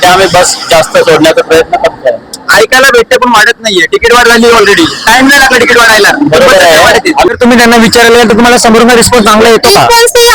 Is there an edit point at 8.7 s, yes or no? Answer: no